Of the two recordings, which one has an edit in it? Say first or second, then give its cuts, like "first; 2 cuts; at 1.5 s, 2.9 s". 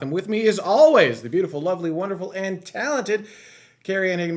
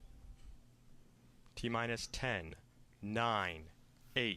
first; 1 cut; at 1.1 s